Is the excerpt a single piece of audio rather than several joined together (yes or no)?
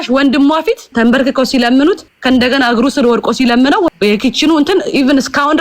no